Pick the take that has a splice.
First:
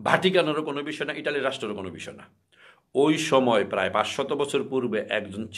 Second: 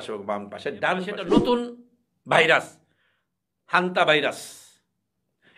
second; 1 cut; at 1.3 s

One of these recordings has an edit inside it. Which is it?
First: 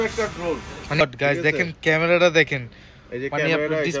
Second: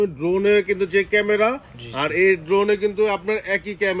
first; 1 cut; at 1.0 s

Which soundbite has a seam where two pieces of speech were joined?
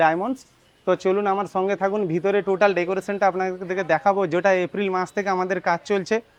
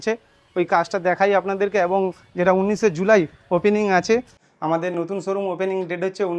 second; 1 cut; at 4.5 s

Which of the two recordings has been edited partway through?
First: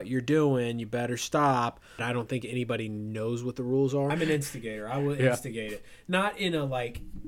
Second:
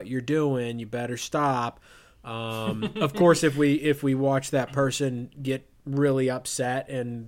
first; 2 cuts; at 2.0 s, 4.1 s

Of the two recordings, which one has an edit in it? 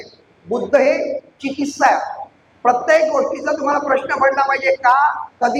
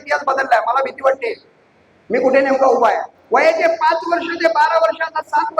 second; 1 cut; at 3.1 s

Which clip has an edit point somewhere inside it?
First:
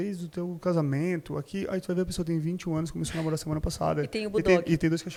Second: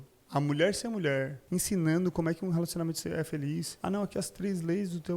second; 2 cuts; at 1.4 s, 3.7 s

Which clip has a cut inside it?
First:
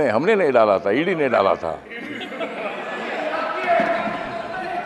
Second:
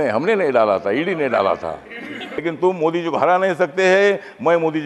second; 1 cut; at 2.4 s

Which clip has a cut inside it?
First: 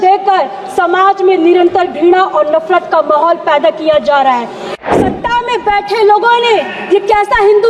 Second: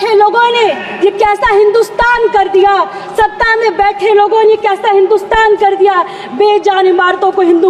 first; 1 cut; at 4.6 s

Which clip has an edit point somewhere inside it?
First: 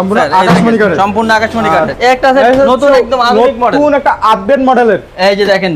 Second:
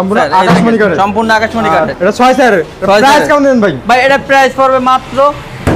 first; 1 cut; at 1.9 s

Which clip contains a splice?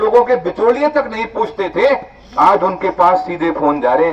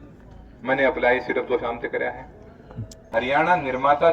second; 1 cut; at 3.1 s

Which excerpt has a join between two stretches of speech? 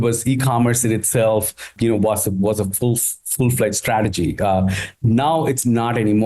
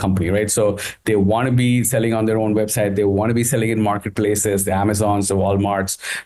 first; 1 cut; at 1.7 s

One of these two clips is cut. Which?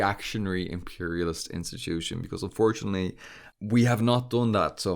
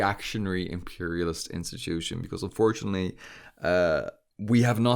first; 1 cut; at 3.4 s

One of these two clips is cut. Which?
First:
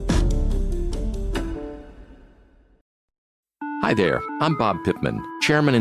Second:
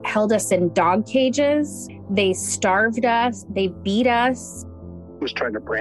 first; 1 cut; at 2.8 s

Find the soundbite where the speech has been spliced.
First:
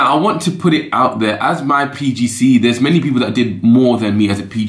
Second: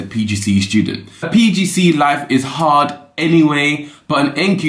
second; 1 cut; at 1.3 s

